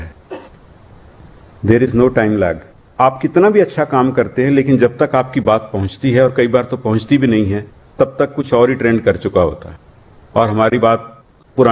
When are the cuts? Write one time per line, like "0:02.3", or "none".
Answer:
0:02.8